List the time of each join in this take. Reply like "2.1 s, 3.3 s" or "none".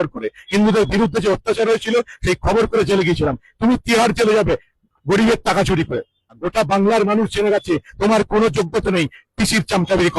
6.4 s